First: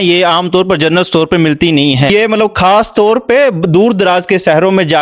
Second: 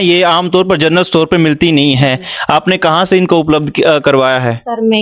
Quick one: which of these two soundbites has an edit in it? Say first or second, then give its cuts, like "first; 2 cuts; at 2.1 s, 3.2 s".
first; 1 cut; at 2.1 s